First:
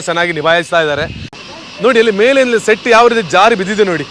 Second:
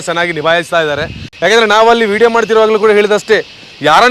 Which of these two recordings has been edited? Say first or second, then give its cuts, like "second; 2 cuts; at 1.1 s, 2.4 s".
first; 1 cut; at 1.3 s